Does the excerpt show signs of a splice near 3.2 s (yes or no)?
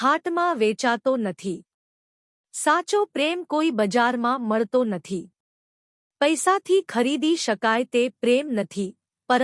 no